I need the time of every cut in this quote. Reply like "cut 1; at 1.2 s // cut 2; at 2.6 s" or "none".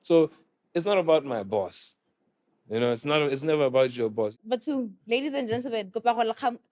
cut 1; at 4.3 s